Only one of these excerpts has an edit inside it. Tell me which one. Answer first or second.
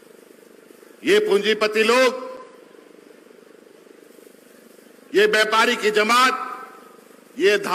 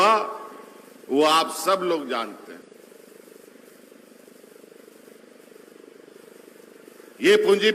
second